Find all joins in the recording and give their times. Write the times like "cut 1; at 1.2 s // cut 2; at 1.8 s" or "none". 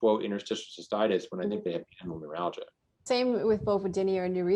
cut 1; at 3.0 s